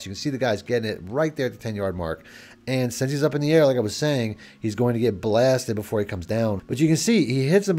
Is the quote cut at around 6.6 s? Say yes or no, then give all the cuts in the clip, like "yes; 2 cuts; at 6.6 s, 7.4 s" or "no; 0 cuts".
yes; 1 cut; at 6.6 s